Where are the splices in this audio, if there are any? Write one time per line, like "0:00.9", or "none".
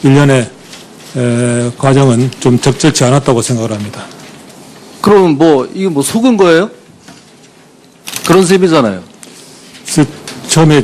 none

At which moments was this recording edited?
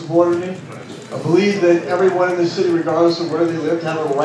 none

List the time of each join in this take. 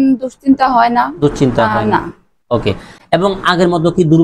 none

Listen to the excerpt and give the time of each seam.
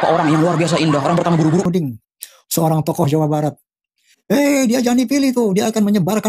0:01.7

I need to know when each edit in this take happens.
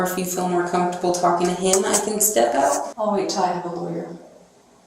0:02.9

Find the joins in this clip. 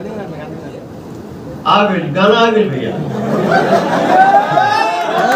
none

